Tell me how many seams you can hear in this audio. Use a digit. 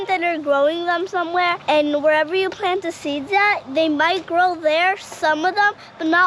1